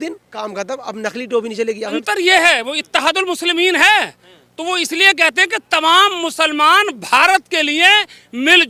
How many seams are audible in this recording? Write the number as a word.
one